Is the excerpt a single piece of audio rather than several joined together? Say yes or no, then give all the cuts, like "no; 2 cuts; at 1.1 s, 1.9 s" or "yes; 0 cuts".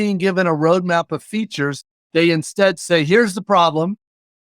no; 1 cut; at 1.9 s